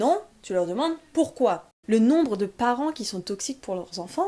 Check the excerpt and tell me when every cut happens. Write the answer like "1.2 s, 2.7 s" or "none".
1.7 s